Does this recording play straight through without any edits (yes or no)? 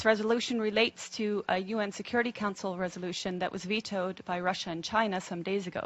no